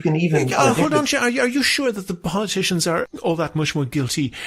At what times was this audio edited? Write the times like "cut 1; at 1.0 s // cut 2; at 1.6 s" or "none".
cut 1; at 3.0 s

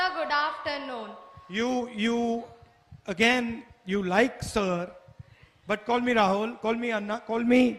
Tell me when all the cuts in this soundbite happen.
none

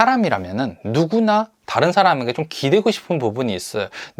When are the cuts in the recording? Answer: none

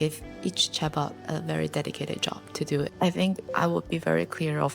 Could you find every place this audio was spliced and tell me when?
cut 1; at 2.9 s

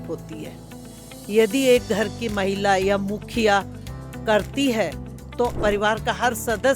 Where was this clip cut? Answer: cut 1; at 5.6 s

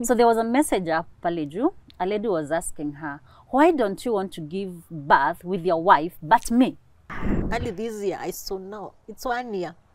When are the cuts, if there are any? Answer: cut 1; at 7.4 s

